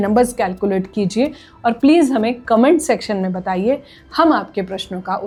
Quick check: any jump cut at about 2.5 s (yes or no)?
no